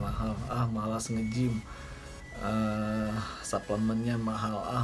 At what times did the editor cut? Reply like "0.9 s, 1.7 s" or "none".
none